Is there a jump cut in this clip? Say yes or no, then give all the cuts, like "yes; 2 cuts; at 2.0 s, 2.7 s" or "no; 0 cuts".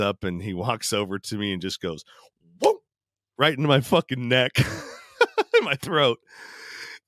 no; 0 cuts